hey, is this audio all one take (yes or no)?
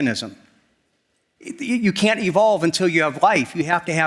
yes